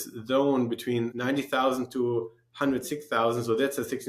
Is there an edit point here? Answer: yes; 1 cut; at 1.1 s

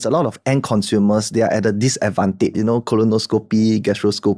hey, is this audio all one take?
no; 1 cut; at 2.6 s

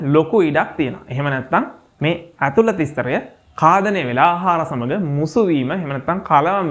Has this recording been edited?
no; 0 cuts

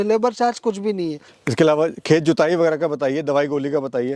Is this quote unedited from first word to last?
yes; 0 cuts

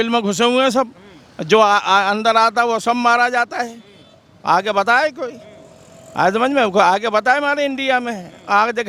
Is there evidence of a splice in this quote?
no; 0 cuts

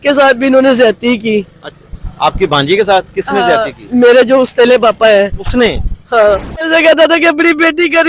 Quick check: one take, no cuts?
no; 1 cut; at 6.7 s

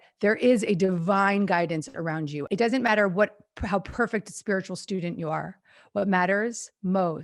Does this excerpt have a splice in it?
yes; 1 cut; at 2.4 s

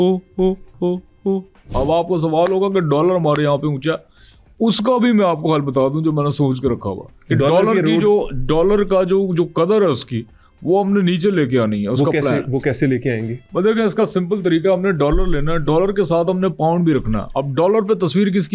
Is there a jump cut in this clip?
yes; 1 cut; at 1.7 s

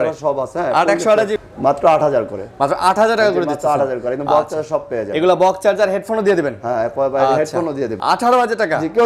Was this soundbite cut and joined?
yes; 2 cuts; at 1.4 s, 8.0 s

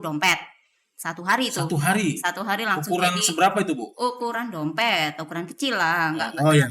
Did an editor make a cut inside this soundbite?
no; 0 cuts

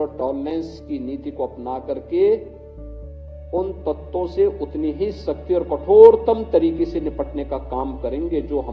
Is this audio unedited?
yes; 0 cuts

